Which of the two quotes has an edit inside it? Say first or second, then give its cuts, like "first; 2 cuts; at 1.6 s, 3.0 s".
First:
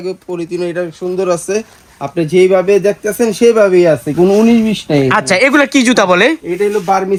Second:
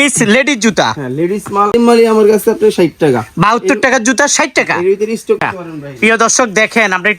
second; 2 cuts; at 1.7 s, 5.4 s